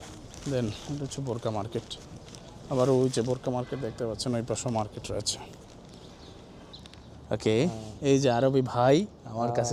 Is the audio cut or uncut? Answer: cut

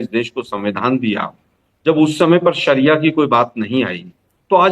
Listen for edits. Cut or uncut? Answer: uncut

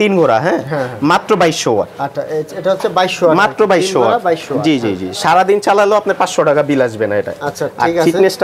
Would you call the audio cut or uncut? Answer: uncut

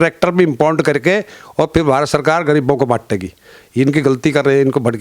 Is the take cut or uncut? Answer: uncut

